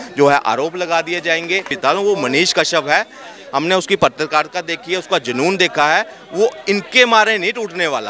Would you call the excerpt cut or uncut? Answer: cut